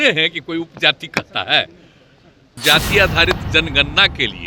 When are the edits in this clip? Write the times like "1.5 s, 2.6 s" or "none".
2.6 s